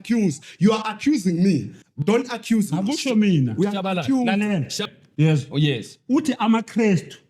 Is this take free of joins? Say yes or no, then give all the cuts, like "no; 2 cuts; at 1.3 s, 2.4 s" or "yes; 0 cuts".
no; 1 cut; at 4.9 s